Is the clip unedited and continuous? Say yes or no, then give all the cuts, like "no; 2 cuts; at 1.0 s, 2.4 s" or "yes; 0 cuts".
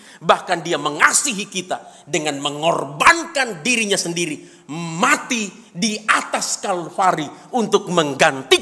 yes; 0 cuts